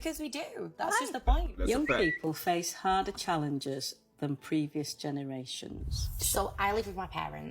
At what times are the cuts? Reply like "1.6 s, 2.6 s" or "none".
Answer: 3.2 s

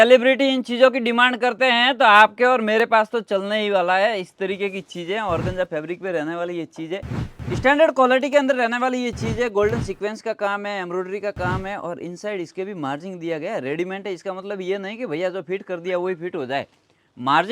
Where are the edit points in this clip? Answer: 7.3 s

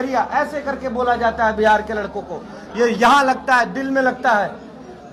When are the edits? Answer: none

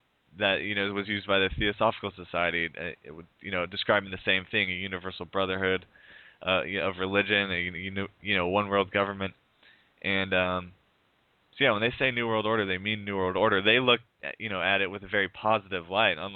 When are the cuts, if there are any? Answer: 7.0 s

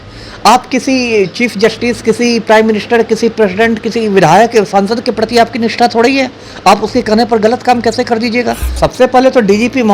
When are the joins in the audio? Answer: 8.8 s

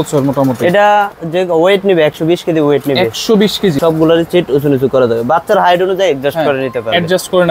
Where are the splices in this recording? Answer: 1.2 s, 3.8 s

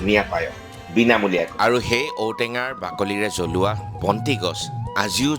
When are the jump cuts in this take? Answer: 1.5 s

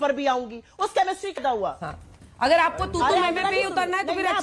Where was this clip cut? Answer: 1.4 s

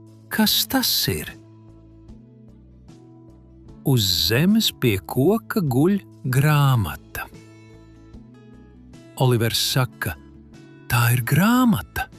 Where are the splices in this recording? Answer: 2.0 s, 3.8 s, 7.4 s, 9.1 s

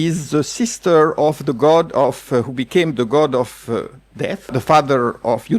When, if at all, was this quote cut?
4.5 s

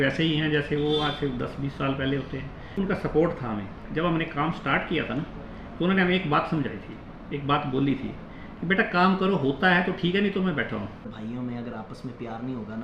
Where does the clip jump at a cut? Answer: 2.8 s, 3.8 s, 11.1 s

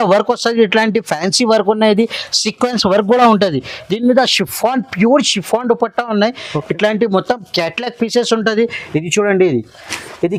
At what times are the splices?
none

